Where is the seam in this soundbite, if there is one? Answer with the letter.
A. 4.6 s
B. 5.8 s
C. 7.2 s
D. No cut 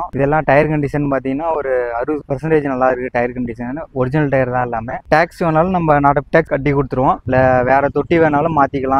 C